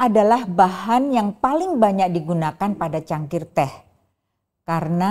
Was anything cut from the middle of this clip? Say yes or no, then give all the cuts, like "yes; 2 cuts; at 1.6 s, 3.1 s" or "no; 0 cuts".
no; 0 cuts